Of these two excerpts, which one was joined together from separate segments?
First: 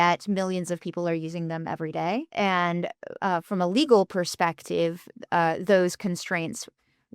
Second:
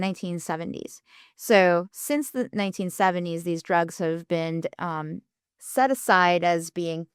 first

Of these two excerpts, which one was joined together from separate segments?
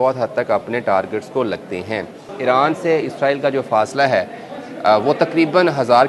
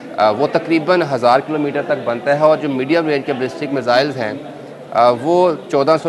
first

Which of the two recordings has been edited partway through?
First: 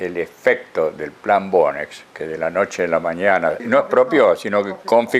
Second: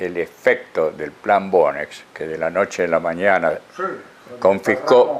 first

